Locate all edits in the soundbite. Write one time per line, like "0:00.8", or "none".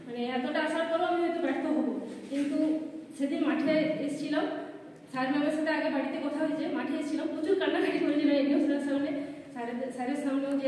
none